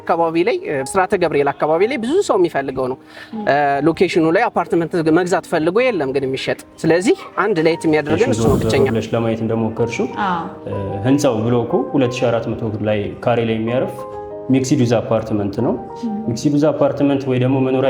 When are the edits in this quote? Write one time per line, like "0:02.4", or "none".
0:08.9